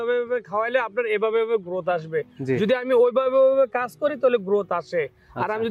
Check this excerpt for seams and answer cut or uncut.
uncut